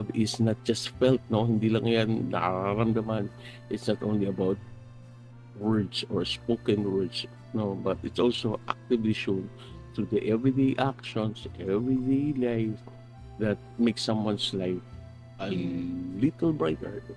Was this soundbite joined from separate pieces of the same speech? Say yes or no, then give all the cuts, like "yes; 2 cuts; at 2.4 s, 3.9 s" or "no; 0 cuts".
no; 0 cuts